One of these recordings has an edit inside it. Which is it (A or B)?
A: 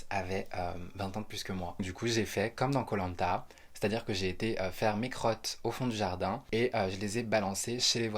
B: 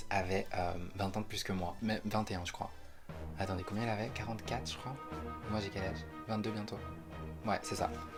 A